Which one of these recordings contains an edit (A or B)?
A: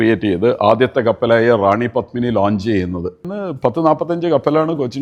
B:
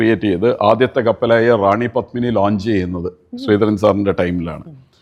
A